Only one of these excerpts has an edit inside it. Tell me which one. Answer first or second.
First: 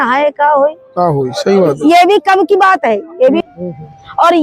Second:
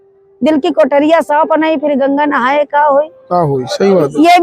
first